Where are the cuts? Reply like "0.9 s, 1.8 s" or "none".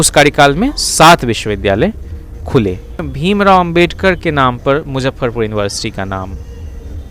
3.1 s